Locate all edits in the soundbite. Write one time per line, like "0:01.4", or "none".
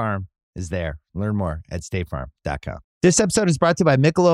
0:02.9